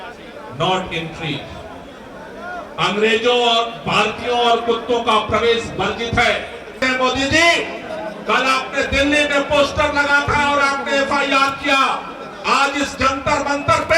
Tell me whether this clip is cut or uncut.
cut